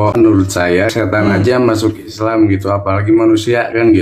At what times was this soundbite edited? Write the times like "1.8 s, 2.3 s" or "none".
0.9 s